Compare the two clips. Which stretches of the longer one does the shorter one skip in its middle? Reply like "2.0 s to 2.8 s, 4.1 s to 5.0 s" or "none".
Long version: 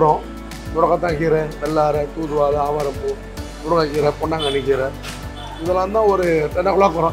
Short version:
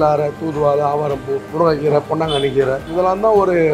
3.2 s to 3.6 s, 5.0 s to 5.6 s